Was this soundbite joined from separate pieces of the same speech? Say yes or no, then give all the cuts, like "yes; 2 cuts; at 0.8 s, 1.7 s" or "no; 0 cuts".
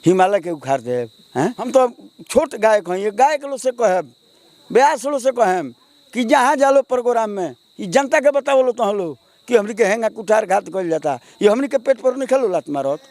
yes; 1 cut; at 1.7 s